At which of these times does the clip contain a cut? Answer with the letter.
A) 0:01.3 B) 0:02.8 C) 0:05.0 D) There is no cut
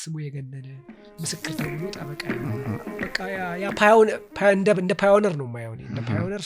B